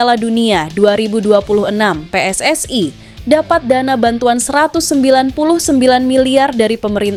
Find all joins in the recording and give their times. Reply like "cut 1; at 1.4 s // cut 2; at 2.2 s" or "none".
none